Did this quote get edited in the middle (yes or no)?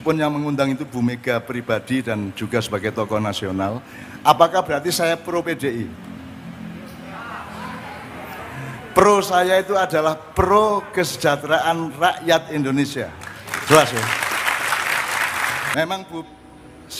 yes